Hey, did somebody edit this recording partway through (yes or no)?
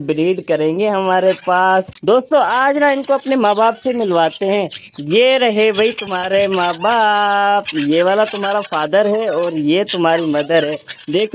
yes